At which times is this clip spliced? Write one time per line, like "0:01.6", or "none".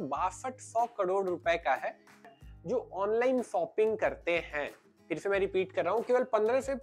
0:02.2